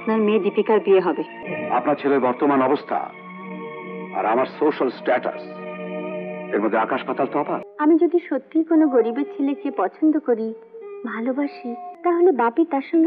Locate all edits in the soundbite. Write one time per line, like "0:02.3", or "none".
0:01.3
0:07.6
0:11.9